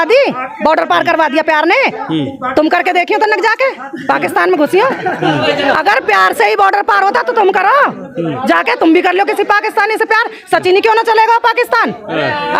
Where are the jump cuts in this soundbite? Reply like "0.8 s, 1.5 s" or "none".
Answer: none